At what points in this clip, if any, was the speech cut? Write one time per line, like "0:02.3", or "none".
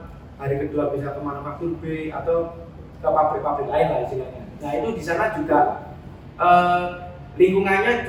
none